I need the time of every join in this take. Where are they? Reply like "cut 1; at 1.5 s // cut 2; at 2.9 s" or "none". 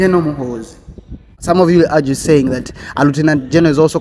cut 1; at 1.4 s